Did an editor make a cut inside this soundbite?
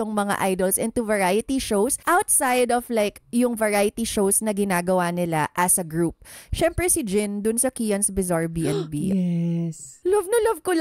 yes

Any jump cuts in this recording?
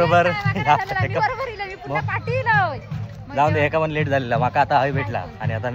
no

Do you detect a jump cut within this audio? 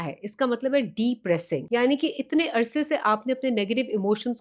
yes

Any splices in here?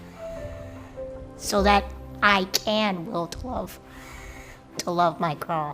yes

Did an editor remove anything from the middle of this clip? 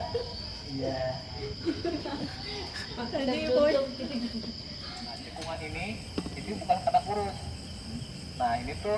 yes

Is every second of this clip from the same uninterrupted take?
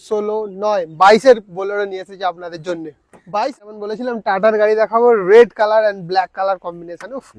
no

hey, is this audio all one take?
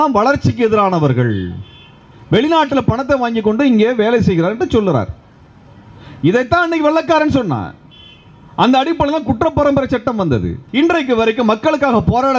no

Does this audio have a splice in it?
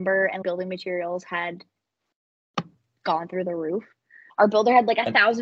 no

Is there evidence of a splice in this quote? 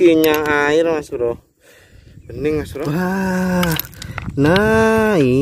yes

